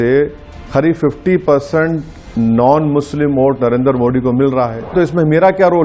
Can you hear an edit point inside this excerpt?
yes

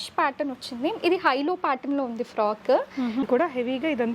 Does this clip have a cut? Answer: yes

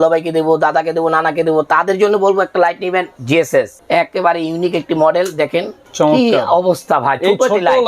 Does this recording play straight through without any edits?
no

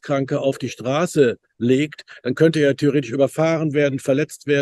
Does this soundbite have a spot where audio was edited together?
no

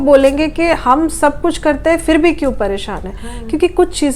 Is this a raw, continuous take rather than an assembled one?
yes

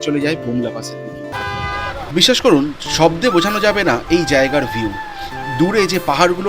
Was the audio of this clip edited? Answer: yes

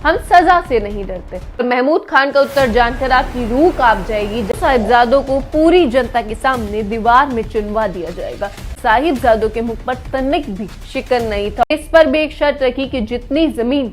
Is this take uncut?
no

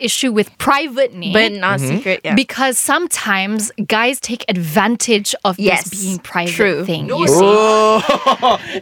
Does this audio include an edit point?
no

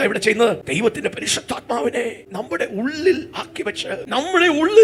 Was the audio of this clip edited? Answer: no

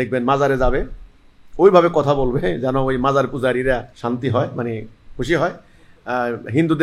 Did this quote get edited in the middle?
yes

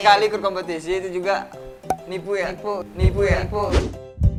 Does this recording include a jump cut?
no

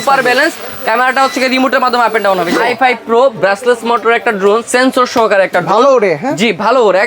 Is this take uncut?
no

